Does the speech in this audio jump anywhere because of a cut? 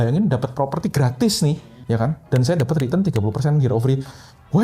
yes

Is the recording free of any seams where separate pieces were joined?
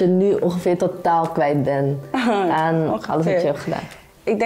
yes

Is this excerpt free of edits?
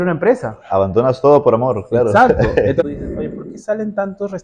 no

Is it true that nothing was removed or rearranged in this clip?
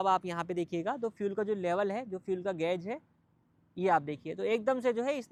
yes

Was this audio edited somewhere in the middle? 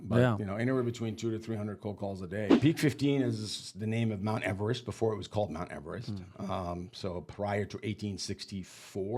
yes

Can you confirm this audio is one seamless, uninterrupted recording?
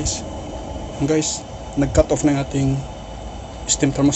no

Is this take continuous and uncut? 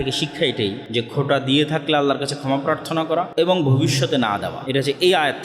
no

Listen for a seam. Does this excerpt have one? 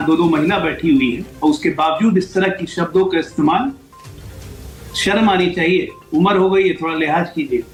no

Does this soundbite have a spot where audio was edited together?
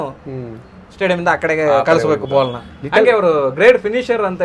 no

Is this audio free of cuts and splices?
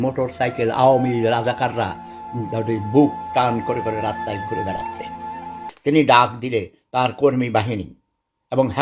no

